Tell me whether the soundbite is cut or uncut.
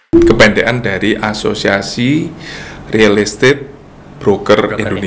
uncut